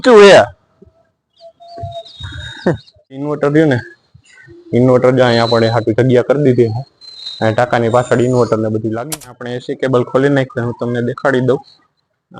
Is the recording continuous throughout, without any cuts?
no; 2 cuts; at 3.3 s, 9.2 s

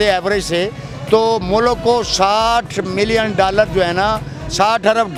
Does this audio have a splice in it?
no; 0 cuts

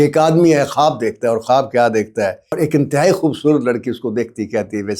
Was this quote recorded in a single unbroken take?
no; 1 cut; at 2.5 s

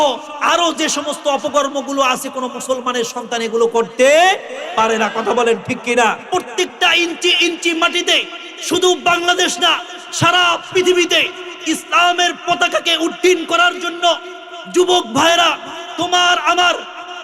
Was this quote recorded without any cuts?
no; 1 cut; at 6.2 s

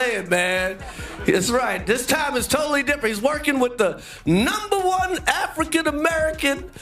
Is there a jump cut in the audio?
no; 0 cuts

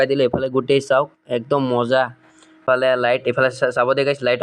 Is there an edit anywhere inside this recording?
yes; 1 cut; at 2.6 s

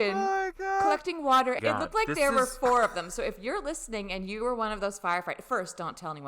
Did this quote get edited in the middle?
yes; 1 cut; at 1.6 s

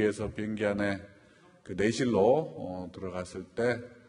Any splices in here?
no; 0 cuts

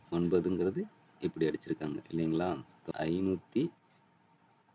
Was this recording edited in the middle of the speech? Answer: yes; 1 cut; at 2.8 s

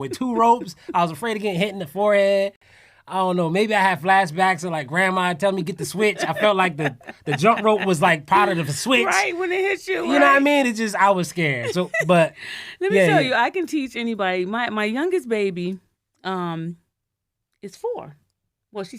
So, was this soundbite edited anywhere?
no; 0 cuts

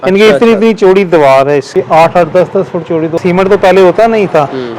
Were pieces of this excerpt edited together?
yes; 2 cuts; at 1.7 s, 3.1 s

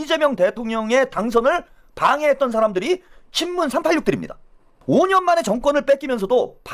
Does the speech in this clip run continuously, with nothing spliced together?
yes; 0 cuts

